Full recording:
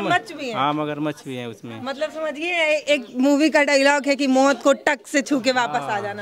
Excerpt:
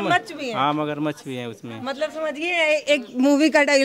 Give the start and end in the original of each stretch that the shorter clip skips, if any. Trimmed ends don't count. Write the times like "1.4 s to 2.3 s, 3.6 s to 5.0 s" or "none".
none